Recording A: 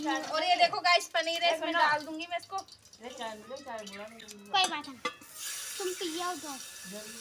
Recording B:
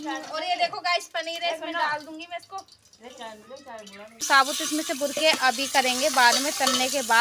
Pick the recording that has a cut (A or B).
B